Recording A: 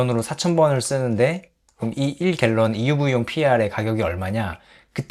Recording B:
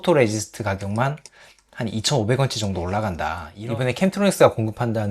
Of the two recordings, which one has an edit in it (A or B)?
B